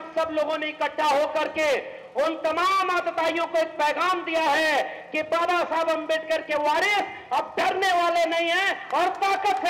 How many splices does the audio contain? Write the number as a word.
zero